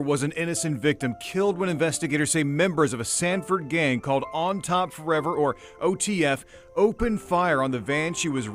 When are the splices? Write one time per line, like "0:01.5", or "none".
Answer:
none